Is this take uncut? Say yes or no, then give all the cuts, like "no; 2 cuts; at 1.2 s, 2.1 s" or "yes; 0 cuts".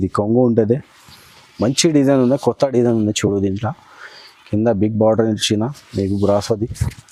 yes; 0 cuts